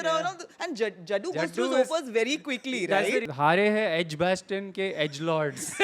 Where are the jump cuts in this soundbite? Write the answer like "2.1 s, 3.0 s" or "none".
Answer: 3.3 s